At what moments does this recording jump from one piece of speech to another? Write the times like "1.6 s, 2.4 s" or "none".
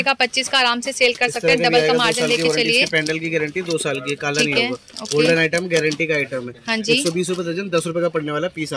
none